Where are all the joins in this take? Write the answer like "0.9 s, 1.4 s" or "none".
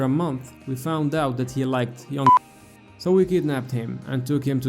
2.3 s